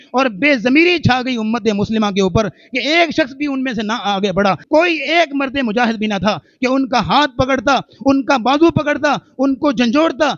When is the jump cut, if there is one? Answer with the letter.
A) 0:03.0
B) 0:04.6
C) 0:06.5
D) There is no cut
B